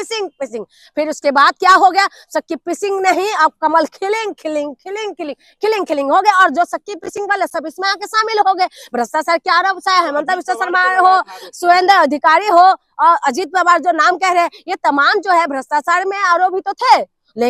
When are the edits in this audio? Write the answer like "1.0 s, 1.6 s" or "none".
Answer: none